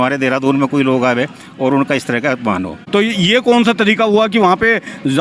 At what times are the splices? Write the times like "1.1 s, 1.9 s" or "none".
2.8 s

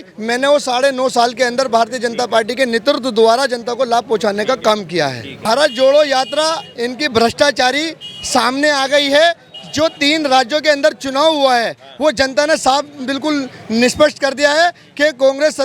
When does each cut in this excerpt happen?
5.3 s

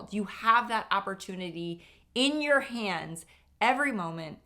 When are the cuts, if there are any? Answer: none

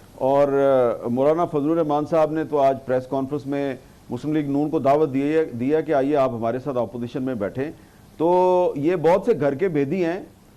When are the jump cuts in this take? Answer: none

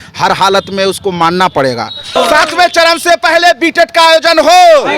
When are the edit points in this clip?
2.2 s

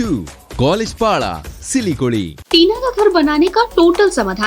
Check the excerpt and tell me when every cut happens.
2.4 s

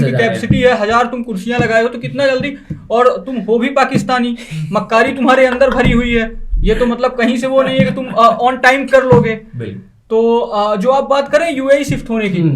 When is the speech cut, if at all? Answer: none

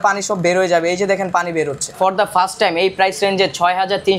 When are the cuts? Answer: 1.9 s

